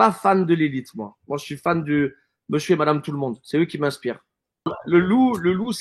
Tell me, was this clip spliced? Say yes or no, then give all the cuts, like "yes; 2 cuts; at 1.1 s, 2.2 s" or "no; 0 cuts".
yes; 1 cut; at 4.8 s